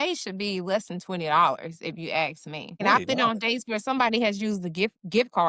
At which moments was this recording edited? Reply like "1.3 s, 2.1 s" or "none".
2.8 s